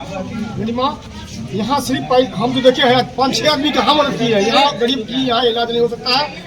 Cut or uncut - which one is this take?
uncut